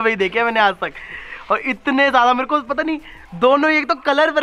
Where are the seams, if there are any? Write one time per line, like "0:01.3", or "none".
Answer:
none